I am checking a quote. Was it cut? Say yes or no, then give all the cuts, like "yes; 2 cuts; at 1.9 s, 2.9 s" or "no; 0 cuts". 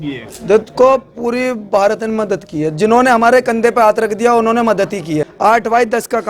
yes; 1 cut; at 5.3 s